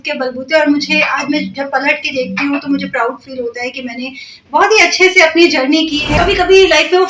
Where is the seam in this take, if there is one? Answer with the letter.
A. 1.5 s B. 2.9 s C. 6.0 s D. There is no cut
C